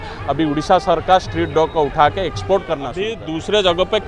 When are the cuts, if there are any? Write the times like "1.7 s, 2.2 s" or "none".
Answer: 3.2 s